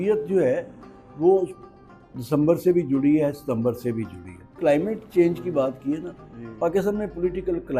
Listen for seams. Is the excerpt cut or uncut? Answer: cut